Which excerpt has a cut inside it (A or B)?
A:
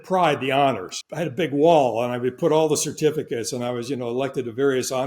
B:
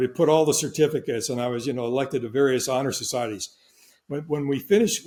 A